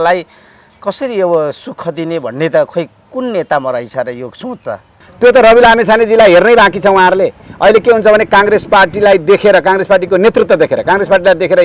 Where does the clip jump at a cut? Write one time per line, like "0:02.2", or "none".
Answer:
0:04.9